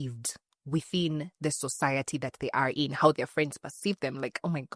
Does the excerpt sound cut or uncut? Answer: uncut